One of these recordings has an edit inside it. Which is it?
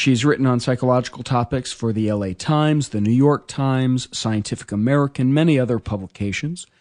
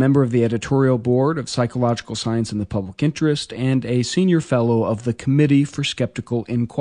first; 1 cut; at 1.5 s

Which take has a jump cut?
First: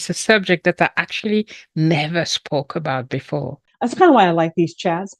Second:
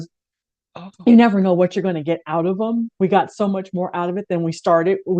first; 1 cut; at 3.7 s

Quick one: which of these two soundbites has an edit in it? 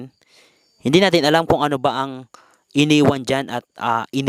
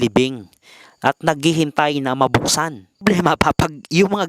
second; 1 cut; at 3.0 s

